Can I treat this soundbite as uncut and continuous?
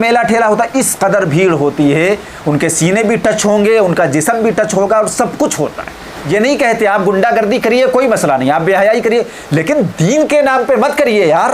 no; 1 cut; at 6.2 s

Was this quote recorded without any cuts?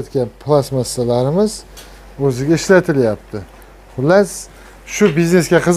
yes; 0 cuts

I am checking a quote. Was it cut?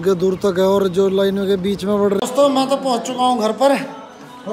yes; 1 cut; at 2.2 s

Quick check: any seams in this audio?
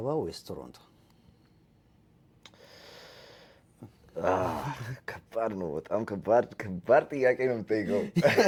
no; 0 cuts

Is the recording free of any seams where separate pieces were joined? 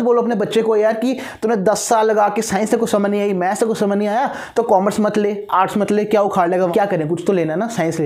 no; 1 cut; at 6.7 s

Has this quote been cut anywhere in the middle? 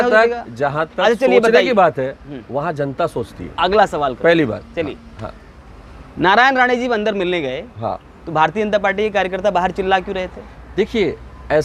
no; 0 cuts

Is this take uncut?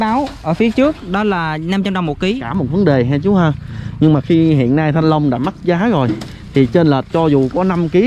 no; 1 cut; at 2.5 s

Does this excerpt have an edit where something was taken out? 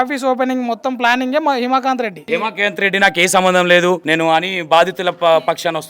yes; 2 cuts; at 2.3 s, 4.0 s

